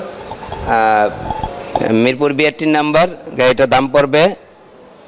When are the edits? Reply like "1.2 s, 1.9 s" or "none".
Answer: none